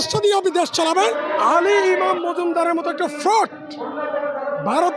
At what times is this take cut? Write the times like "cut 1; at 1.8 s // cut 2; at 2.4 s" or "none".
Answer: cut 1; at 1.2 s